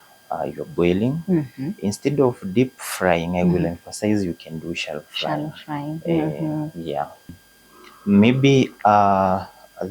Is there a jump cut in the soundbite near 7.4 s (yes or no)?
yes